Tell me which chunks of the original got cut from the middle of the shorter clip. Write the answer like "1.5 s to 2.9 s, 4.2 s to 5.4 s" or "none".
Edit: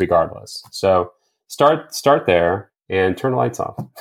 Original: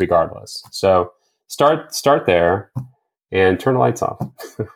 2.7 s to 3.2 s